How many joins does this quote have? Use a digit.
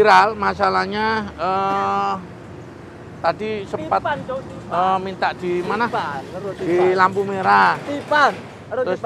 0